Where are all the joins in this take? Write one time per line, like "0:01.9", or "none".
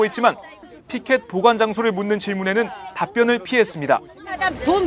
0:02.8